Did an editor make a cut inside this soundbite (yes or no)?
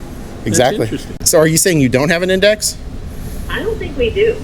yes